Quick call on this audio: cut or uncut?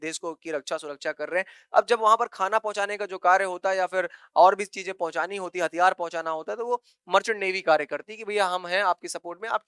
uncut